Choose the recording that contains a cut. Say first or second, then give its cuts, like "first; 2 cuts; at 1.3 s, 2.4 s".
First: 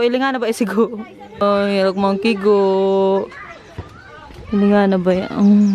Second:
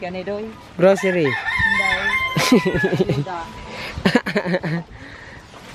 first; 1 cut; at 1.4 s